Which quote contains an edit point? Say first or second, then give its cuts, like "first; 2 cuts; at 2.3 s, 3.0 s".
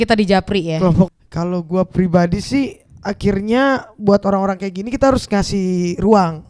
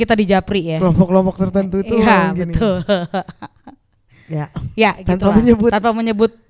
first; 1 cut; at 1.1 s